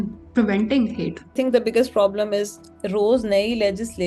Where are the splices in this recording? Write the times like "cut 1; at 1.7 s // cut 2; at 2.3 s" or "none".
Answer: cut 1; at 1.3 s // cut 2; at 2.6 s